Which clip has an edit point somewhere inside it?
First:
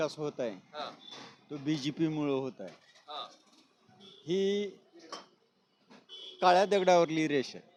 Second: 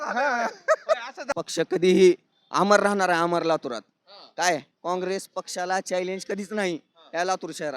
second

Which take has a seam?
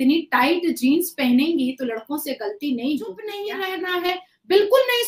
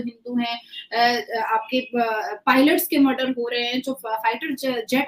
first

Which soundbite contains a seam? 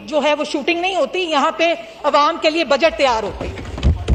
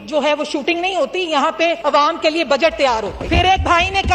second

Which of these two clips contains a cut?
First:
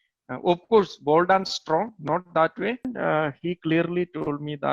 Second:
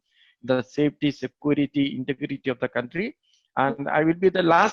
first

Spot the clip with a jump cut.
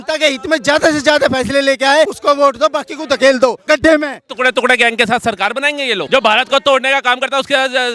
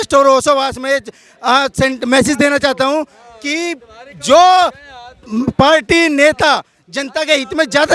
first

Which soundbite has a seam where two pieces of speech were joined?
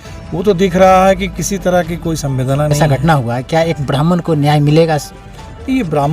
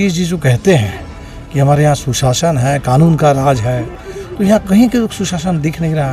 first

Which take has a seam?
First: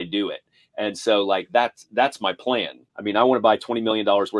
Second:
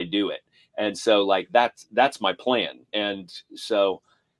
first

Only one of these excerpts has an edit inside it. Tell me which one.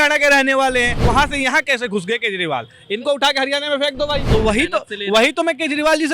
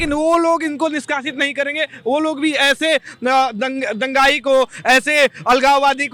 first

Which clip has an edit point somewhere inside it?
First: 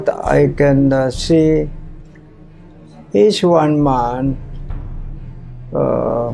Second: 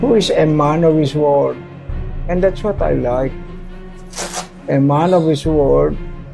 second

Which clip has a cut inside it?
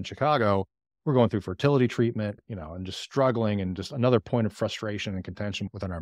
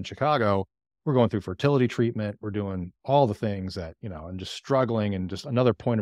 first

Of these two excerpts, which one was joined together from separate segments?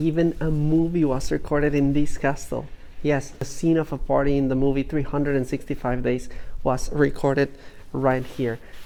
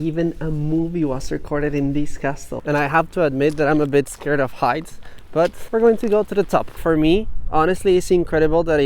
second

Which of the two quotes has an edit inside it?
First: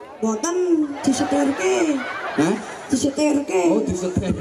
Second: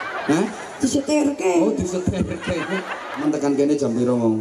second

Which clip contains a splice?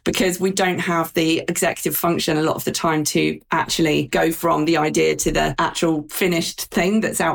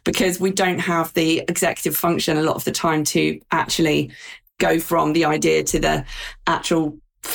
first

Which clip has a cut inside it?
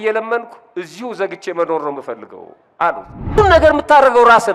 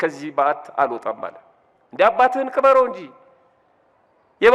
first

